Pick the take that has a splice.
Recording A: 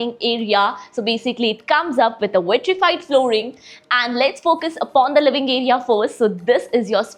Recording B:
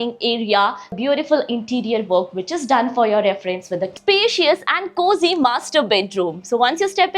B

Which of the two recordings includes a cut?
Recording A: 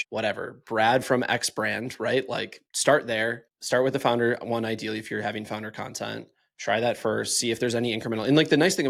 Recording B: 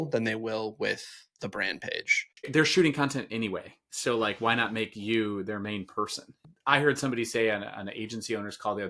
B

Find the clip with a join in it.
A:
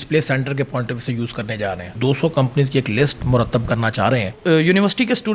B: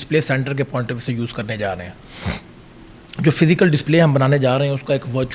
A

